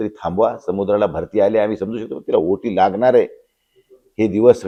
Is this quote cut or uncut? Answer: uncut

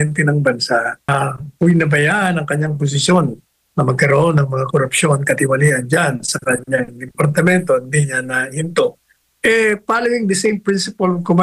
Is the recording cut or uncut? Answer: cut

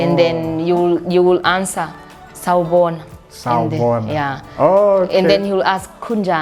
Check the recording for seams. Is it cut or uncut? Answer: uncut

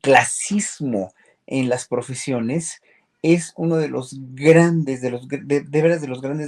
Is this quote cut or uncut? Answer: uncut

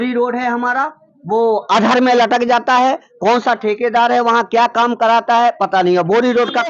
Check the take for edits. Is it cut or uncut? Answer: uncut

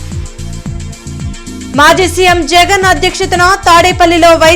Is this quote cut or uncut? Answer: uncut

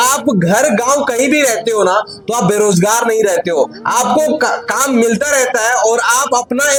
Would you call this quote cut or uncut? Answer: uncut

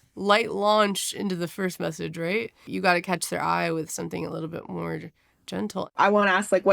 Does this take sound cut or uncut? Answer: cut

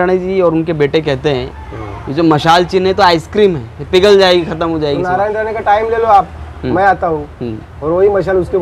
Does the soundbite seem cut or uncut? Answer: uncut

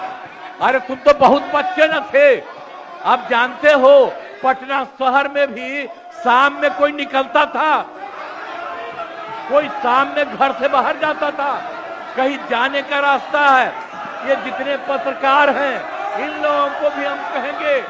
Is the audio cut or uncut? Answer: uncut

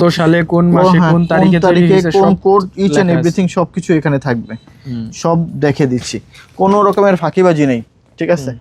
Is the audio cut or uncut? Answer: uncut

